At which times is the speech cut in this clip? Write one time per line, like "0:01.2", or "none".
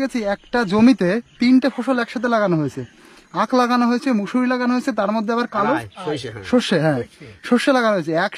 none